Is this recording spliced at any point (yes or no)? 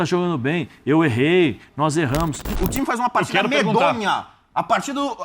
yes